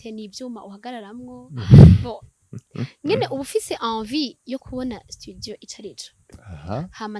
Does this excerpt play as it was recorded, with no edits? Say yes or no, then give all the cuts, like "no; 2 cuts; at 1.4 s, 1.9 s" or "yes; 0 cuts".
yes; 0 cuts